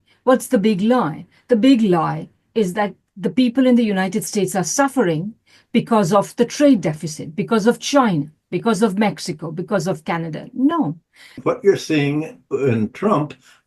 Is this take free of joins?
no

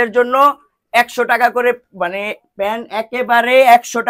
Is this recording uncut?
yes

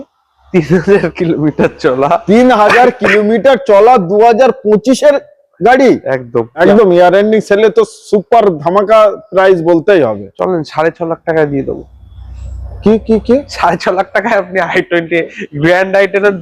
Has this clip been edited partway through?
yes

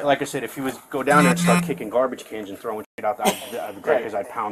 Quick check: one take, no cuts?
yes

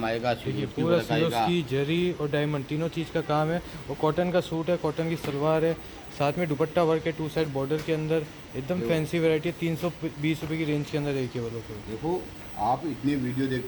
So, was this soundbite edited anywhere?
no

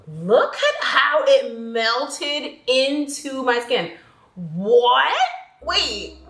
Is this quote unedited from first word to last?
yes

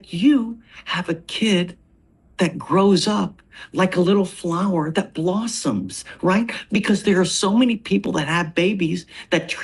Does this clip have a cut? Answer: no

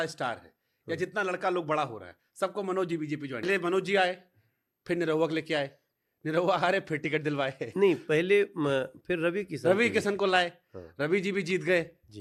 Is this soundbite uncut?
yes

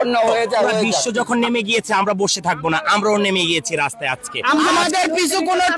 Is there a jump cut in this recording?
yes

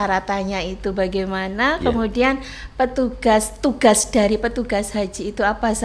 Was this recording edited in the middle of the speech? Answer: no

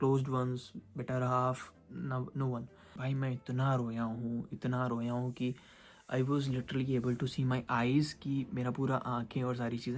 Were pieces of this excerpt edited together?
yes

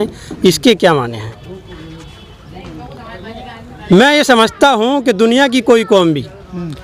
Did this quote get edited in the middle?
no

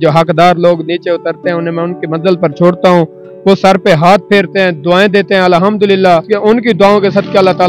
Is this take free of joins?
no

